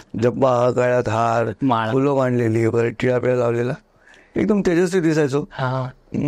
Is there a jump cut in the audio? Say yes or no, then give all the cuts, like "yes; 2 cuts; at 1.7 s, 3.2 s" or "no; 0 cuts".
no; 0 cuts